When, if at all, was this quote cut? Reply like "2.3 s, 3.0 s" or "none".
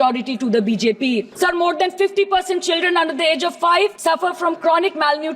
1.3 s, 4.0 s